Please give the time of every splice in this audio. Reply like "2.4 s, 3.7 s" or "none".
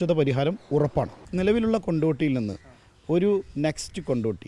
1.3 s